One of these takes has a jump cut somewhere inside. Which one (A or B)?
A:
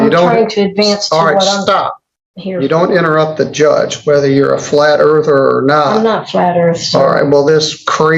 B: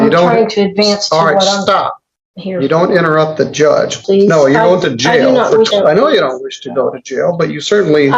B